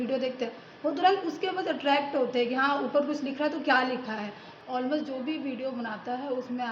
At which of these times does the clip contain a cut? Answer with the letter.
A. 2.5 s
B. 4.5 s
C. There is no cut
B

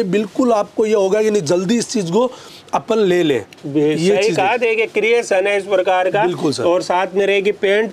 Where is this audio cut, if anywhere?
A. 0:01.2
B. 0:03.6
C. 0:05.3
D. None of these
D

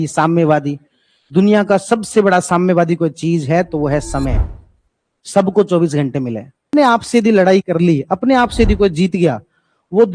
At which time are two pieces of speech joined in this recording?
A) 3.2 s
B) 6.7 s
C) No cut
B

